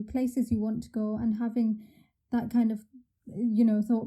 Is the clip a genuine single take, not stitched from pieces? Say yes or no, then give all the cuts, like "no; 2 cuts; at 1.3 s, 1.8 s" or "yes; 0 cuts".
yes; 0 cuts